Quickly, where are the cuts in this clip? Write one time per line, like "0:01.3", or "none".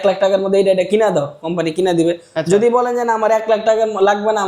none